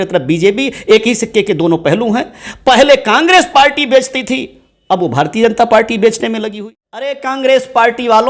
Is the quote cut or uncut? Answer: cut